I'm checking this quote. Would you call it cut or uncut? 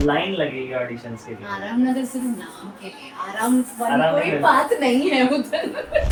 uncut